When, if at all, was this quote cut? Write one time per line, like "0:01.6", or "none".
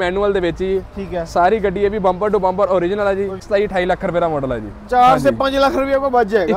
0:03.4